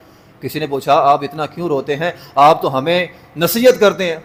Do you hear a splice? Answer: no; 0 cuts

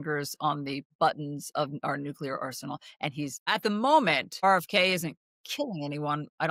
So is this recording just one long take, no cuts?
no; 3 cuts; at 0.9 s, 3.5 s, 4.3 s

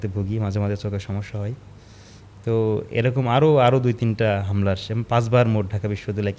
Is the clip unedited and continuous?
yes; 0 cuts

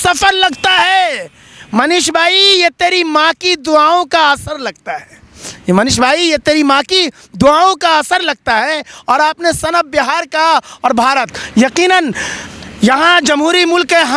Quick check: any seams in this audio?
no; 0 cuts

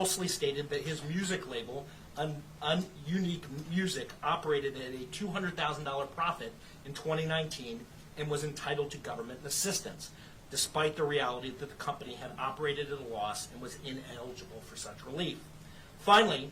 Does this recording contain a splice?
no; 0 cuts

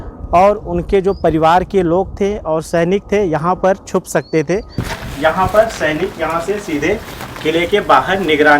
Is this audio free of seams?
no; 1 cut; at 4.8 s

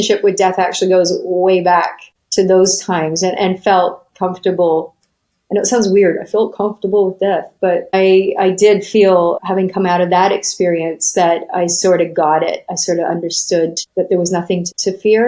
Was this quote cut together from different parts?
no; 0 cuts

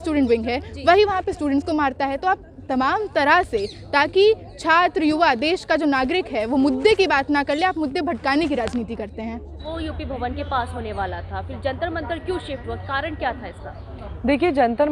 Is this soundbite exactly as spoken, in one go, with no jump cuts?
yes; 0 cuts

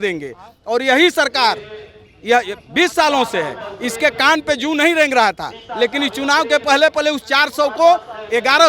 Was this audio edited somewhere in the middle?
no; 0 cuts

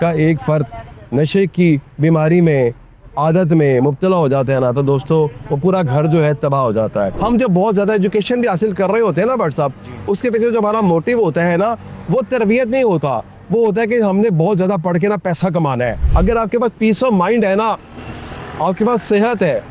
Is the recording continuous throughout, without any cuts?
no; 2 cuts; at 7.1 s, 16.0 s

